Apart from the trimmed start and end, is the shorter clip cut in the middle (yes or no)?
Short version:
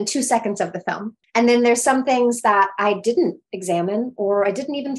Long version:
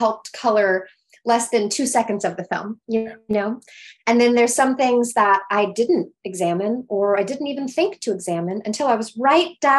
yes